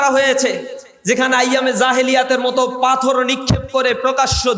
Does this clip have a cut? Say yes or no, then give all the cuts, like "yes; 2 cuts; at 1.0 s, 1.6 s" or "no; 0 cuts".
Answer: no; 0 cuts